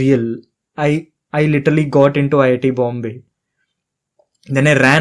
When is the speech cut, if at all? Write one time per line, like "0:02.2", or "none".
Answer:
none